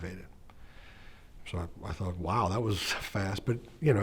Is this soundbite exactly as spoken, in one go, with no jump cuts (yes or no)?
yes